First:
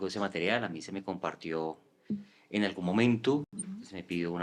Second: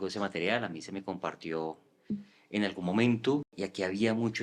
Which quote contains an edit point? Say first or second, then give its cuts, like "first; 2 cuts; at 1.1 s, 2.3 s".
second; 1 cut; at 3.5 s